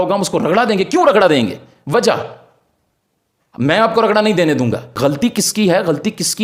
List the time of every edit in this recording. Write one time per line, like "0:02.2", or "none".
none